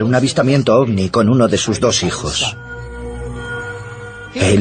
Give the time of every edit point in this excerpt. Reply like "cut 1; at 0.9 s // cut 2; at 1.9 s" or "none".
none